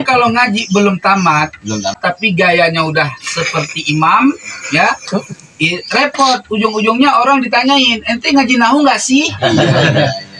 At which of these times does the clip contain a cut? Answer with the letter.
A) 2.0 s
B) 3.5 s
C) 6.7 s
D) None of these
A